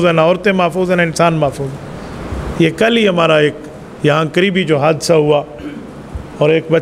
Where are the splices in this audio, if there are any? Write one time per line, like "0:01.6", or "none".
none